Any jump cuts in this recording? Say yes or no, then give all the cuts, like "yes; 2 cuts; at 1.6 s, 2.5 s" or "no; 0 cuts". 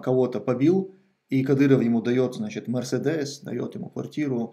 no; 0 cuts